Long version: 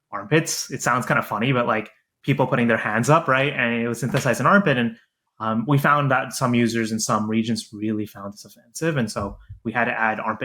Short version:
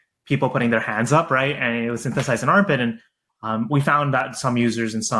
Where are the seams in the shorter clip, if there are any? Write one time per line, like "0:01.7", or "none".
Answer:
none